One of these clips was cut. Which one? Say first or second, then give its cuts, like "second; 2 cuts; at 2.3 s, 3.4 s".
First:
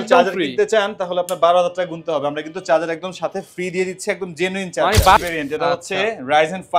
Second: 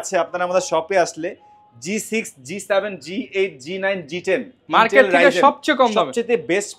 first; 1 cut; at 5.2 s